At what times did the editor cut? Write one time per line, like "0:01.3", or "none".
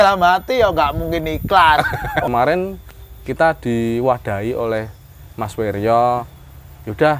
0:02.3